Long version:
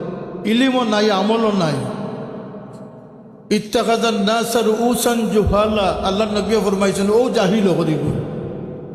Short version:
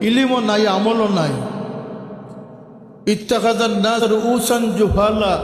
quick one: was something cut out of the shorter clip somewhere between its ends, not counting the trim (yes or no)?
yes